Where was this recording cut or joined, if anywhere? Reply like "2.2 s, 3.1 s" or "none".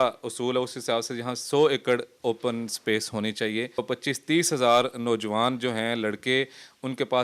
3.8 s